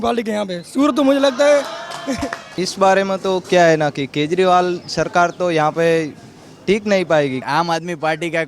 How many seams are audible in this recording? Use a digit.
2